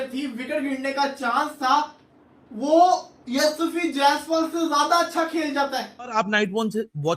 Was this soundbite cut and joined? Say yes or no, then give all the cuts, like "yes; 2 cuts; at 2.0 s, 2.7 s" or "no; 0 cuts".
yes; 1 cut; at 6.1 s